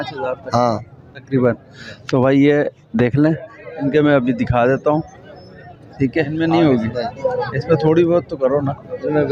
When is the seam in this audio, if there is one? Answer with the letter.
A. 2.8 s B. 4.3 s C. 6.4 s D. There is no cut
C